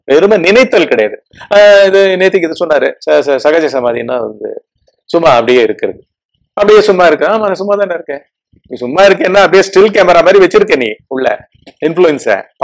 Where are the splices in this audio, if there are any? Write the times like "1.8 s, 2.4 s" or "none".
none